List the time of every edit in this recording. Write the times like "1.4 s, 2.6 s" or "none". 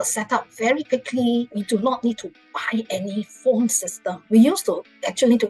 1.5 s, 4.1 s